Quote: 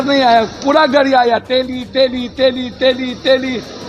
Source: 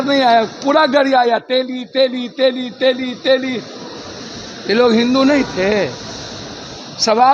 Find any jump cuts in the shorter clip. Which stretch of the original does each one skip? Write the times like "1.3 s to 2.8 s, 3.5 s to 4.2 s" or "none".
none